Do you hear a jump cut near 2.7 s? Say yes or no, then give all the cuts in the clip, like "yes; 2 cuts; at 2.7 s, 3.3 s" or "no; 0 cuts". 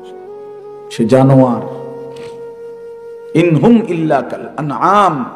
no; 1 cut; at 0.9 s